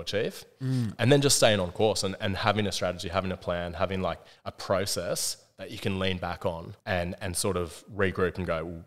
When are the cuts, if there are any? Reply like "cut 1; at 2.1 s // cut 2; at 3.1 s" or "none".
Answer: cut 1; at 0.9 s // cut 2; at 6.7 s

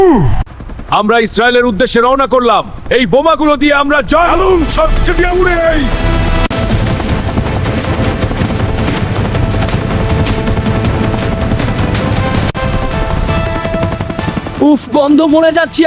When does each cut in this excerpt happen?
none

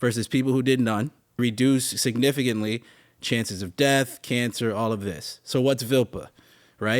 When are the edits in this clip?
cut 1; at 1.4 s

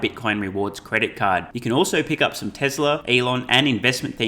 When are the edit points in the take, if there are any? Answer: cut 1; at 3.0 s

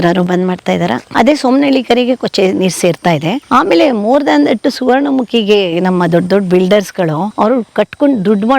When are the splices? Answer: cut 1; at 1.1 s // cut 2; at 3.4 s // cut 3; at 7.3 s

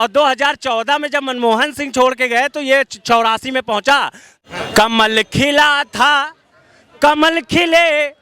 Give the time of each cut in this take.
cut 1; at 4.3 s

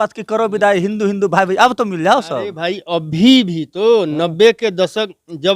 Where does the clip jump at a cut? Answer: none

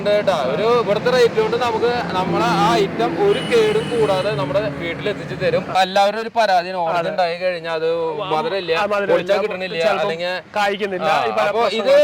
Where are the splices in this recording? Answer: cut 1; at 5.8 s

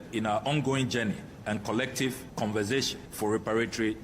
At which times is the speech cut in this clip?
cut 1; at 2.2 s // cut 2; at 3.0 s

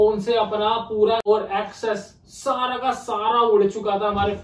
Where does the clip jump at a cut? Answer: cut 1; at 1.2 s

